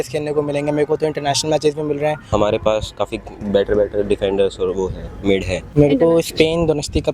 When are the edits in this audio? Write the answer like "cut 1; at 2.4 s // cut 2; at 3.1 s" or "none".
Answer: cut 1; at 2.3 s // cut 2; at 5.6 s